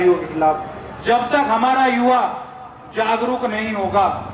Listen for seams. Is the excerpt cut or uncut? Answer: uncut